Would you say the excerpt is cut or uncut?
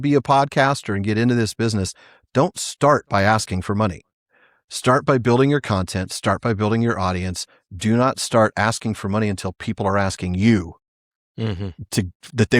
uncut